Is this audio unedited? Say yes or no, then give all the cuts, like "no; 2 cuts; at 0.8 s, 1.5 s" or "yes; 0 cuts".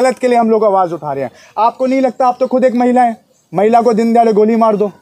yes; 0 cuts